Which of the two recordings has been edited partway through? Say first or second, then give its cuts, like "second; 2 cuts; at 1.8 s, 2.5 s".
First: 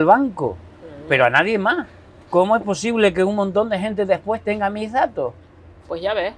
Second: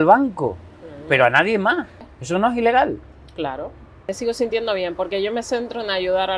second; 2 cuts; at 2.1 s, 4.1 s